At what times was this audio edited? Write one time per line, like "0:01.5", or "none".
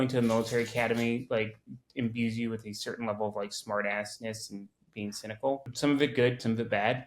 0:05.7